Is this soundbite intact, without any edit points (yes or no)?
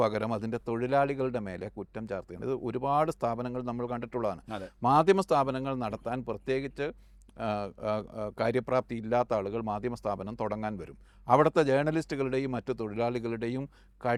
yes